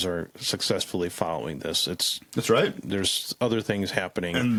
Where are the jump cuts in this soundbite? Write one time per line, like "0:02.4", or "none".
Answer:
none